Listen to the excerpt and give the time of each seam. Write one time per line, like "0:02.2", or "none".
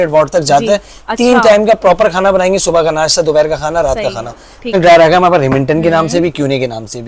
0:04.7